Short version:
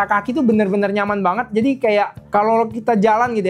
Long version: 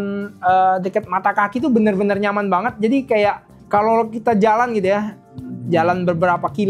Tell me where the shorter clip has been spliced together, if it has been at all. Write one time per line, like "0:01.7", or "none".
0:02.2